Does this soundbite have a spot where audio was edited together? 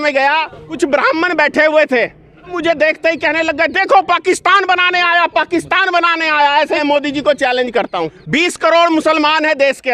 yes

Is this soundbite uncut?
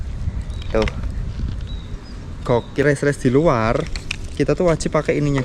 no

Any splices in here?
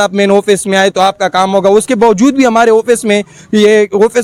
no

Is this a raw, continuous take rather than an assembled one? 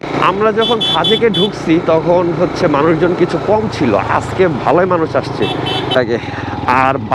no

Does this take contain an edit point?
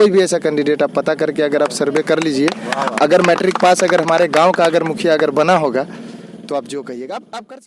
no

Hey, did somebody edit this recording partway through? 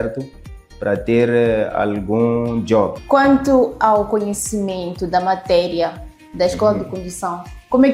yes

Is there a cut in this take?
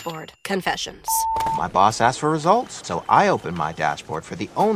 no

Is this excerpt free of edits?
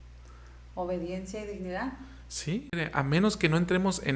no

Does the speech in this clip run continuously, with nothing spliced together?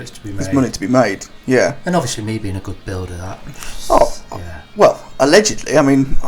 yes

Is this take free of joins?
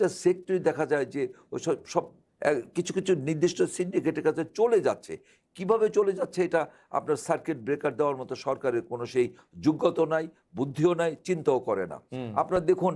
yes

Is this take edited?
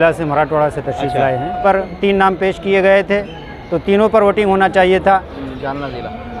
yes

